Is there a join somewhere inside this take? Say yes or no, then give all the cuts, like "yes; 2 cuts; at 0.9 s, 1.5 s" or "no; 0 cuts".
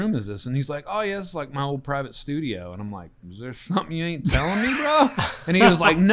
no; 0 cuts